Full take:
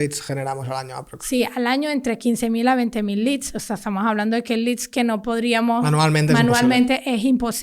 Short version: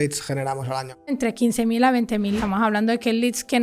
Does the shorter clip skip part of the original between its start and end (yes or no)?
yes